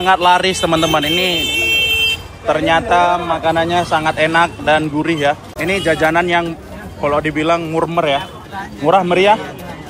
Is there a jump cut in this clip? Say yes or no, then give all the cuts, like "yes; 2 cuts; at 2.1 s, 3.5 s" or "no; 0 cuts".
yes; 1 cut; at 5.5 s